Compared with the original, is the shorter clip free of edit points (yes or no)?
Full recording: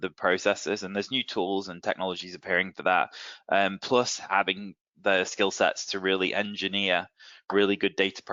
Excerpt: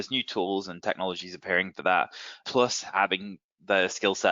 no